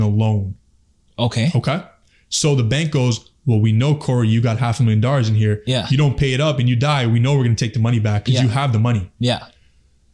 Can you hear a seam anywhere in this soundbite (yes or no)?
no